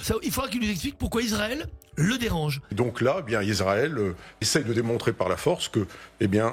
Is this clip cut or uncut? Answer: cut